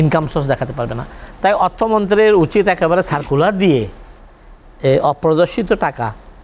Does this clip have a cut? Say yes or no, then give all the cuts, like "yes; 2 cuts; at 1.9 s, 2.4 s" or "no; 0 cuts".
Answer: no; 0 cuts